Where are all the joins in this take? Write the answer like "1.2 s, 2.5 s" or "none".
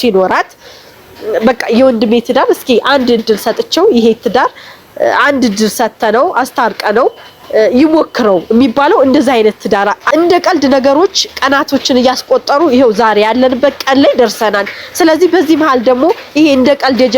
10.0 s